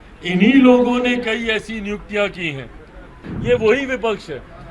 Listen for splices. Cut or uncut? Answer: cut